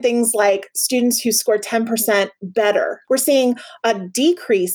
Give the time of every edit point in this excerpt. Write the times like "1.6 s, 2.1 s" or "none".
3.0 s